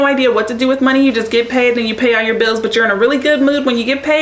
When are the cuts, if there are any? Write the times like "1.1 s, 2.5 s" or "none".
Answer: none